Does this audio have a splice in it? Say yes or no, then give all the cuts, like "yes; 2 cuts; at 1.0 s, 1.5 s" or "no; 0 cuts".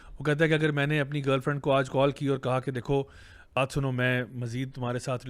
yes; 1 cut; at 3.6 s